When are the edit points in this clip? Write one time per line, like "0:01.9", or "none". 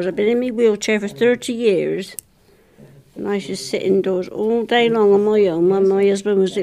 none